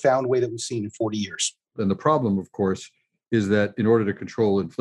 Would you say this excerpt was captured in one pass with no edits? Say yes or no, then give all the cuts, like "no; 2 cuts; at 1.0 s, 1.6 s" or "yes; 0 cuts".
no; 1 cut; at 1.7 s